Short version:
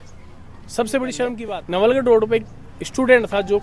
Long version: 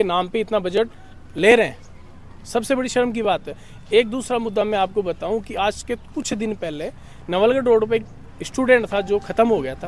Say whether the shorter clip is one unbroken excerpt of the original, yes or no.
no